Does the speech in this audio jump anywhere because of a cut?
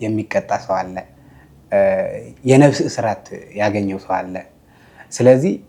no; 0 cuts

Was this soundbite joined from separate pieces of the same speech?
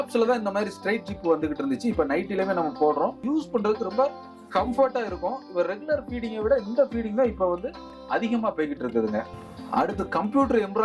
yes; 2 cuts; at 3.2 s, 9.4 s

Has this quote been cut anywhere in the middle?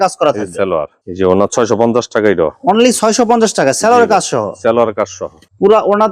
no; 0 cuts

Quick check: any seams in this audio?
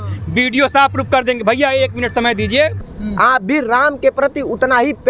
yes; 1 cut; at 2.8 s

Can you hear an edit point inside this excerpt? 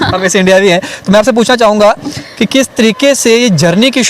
no; 0 cuts

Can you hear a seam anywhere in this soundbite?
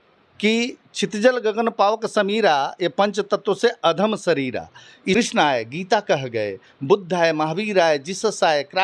yes; 1 cut; at 5.2 s

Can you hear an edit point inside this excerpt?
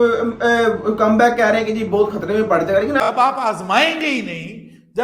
yes; 1 cut; at 3.0 s

